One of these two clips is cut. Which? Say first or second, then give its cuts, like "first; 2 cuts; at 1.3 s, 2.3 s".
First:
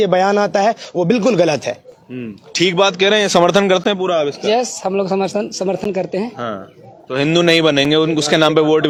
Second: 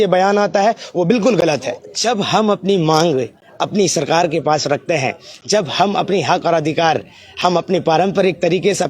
second; 1 cut; at 1.9 s